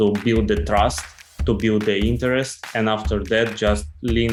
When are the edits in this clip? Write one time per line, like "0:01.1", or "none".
none